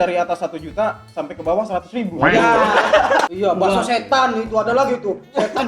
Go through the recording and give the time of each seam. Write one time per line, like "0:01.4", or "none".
0:03.3